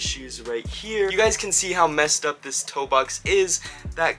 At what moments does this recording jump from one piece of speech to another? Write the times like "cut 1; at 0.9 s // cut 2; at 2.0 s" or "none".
cut 1; at 1.1 s